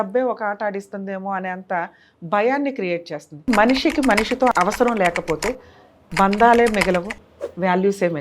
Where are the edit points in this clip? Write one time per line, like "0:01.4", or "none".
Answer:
0:03.5
0:04.5